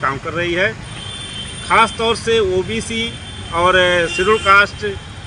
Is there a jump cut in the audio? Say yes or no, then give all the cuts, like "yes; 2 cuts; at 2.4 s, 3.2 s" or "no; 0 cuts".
no; 0 cuts